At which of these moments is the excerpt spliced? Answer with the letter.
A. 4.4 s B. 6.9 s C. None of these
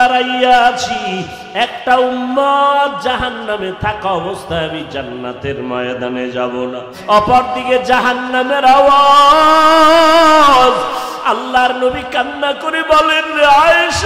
B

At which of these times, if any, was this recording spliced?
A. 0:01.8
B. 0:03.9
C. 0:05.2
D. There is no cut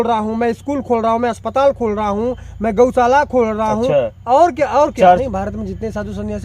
C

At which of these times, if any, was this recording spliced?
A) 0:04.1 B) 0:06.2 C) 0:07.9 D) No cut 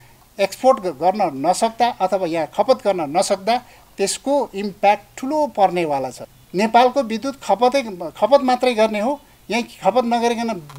B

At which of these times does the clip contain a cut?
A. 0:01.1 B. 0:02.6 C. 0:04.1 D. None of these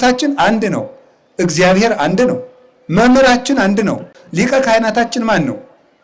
C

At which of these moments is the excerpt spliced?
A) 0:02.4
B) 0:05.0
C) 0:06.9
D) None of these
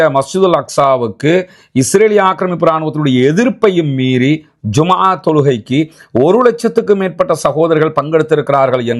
D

